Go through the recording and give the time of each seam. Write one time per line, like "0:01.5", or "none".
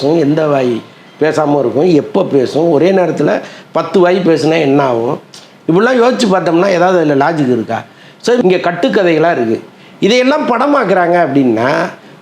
0:08.4